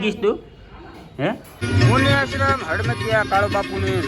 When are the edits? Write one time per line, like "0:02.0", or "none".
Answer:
0:01.6